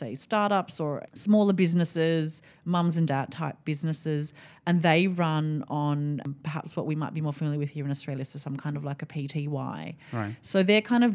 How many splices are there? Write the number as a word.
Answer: two